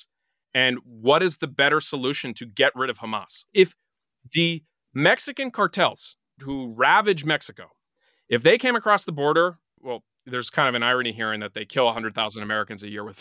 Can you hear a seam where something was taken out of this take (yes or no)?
yes